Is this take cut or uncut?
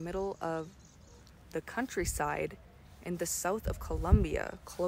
uncut